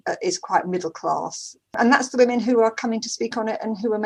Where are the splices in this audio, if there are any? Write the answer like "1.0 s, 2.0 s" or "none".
none

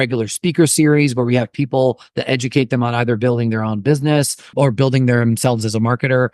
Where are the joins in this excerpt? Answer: 4.5 s

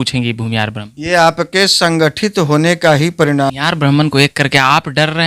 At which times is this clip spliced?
3.5 s

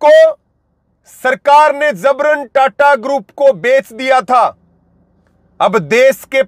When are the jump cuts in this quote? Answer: none

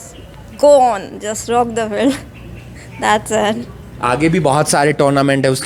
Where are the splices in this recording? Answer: none

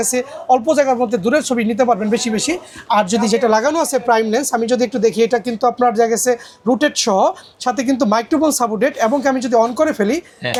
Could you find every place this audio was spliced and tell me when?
none

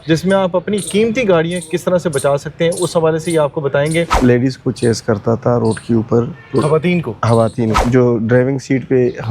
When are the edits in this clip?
4.1 s, 7.8 s

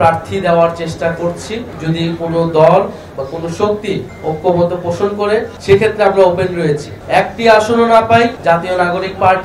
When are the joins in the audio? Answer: 1.7 s, 5.5 s, 7.0 s

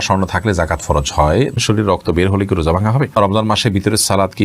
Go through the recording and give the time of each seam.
1.6 s, 3.1 s

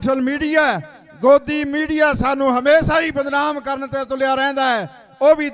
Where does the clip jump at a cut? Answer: none

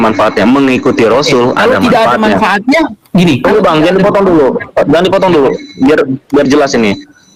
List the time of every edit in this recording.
none

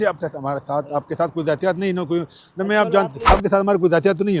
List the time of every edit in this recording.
3.2 s

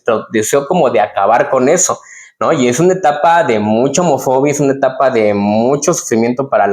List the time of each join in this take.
none

